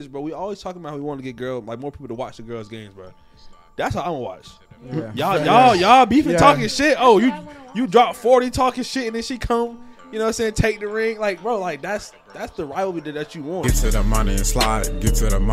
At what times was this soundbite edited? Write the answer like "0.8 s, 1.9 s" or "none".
13.6 s